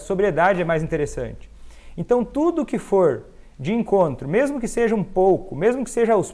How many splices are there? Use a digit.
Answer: 0